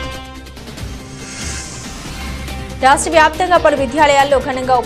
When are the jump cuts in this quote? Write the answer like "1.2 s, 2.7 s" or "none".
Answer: none